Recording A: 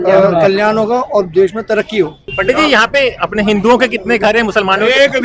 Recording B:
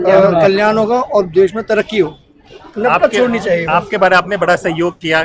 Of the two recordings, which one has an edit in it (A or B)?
A